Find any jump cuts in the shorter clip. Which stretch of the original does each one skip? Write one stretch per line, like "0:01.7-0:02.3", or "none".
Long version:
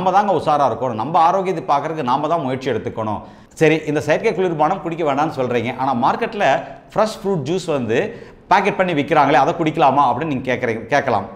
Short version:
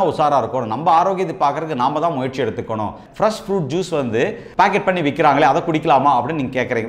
0:03.3-0:06.8
0:08.2-0:08.3